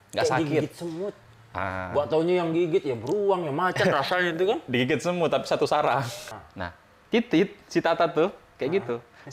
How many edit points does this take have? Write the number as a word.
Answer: one